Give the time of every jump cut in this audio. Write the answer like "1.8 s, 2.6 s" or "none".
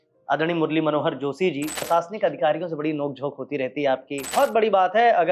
1.9 s, 4.3 s